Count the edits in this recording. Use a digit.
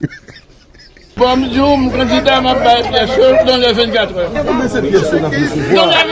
1